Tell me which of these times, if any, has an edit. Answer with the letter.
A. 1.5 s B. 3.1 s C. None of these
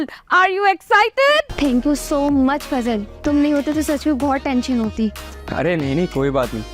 A